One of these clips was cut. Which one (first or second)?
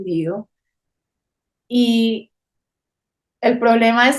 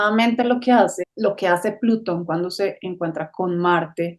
second